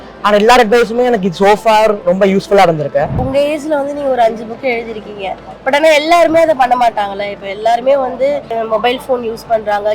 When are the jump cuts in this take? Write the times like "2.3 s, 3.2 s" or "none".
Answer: 3.2 s, 8.5 s